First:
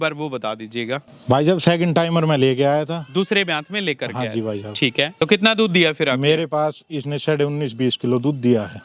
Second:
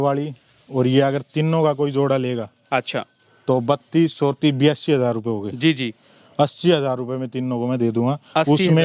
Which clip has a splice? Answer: first; 2 cuts; at 1.1 s, 5.1 s

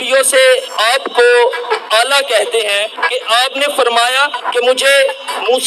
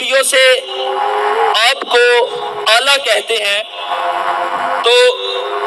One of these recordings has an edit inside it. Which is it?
first; 3 cuts; at 0.8 s, 3.0 s, 4.5 s

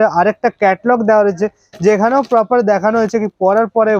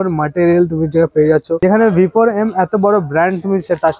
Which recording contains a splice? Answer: second; 1 cut; at 1.5 s

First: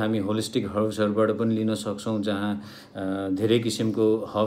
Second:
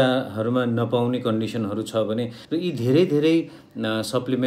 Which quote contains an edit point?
second; 1 cut; at 2.4 s

